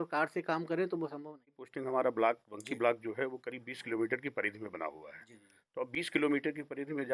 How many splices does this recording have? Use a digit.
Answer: 1